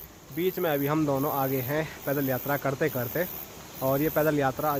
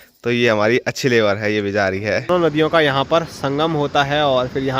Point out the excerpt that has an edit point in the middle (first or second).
second